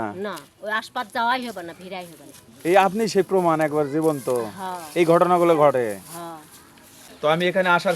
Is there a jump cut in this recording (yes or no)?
yes